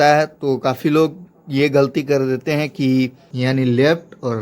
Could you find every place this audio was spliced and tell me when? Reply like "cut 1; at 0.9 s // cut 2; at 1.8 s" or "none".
cut 1; at 3.2 s